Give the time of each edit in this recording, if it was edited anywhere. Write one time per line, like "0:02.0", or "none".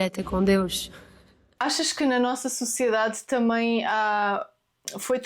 0:01.4